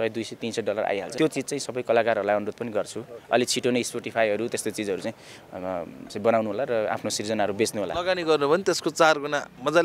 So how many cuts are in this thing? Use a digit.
2